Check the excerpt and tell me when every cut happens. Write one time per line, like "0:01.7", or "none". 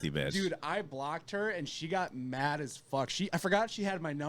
none